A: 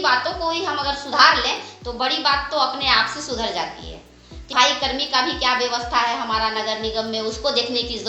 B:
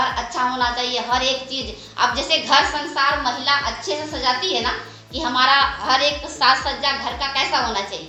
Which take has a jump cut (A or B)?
A